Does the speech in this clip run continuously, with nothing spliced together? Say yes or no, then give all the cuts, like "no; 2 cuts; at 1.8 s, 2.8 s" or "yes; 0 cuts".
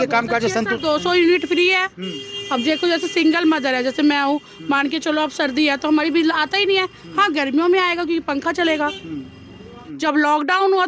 no; 1 cut; at 9.8 s